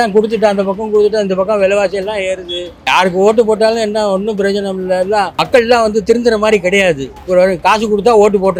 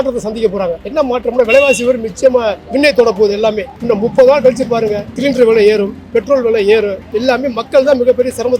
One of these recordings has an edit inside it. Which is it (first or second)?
second